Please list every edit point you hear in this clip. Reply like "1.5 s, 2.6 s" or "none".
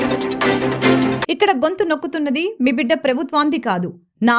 1.1 s